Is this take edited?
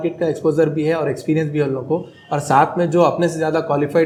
no; 0 cuts

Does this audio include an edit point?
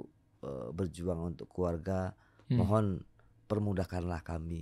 no; 0 cuts

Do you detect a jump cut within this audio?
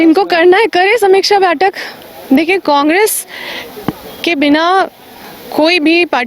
no; 0 cuts

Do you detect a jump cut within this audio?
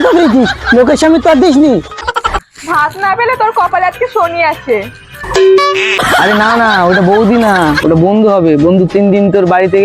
yes; 2 cuts; at 2.1 s, 6.0 s

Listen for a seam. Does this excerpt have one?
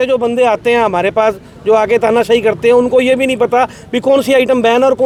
no; 0 cuts

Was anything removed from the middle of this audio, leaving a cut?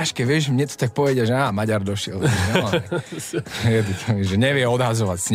no; 0 cuts

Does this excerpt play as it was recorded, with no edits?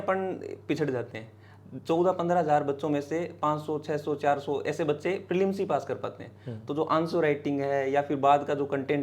yes; 0 cuts

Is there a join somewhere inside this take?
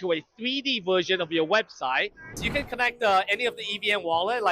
yes; 1 cut; at 2.3 s

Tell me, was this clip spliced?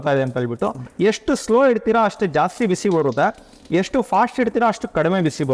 no; 0 cuts

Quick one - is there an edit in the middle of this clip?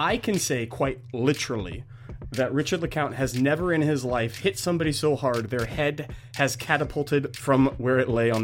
no; 0 cuts

